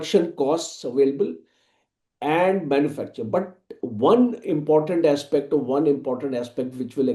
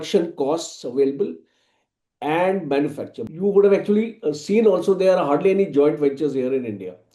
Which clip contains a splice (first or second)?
second